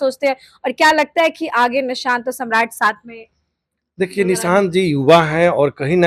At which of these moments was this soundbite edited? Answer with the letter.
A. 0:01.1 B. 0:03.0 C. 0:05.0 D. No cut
D